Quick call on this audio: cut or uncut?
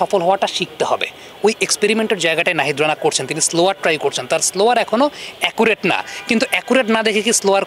uncut